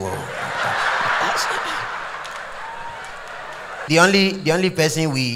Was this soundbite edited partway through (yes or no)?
yes